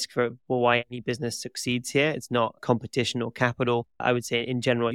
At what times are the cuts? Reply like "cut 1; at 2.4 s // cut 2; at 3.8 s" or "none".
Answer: cut 1; at 3.9 s